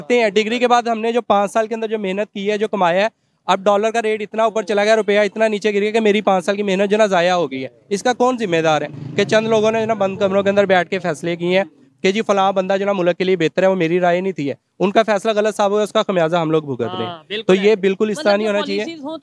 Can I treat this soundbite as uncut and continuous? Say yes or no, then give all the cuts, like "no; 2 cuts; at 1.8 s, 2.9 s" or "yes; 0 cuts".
yes; 0 cuts